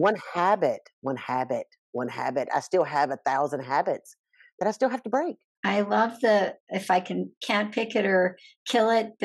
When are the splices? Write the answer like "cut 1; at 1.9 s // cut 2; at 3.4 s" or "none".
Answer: cut 1; at 5.4 s